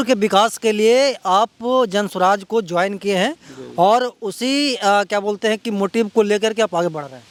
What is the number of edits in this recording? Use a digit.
0